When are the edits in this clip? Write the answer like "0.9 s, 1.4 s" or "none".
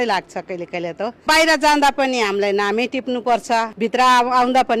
1.2 s, 3.7 s